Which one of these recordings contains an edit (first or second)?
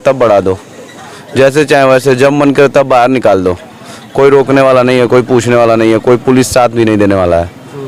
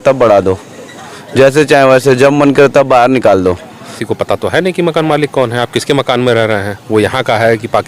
second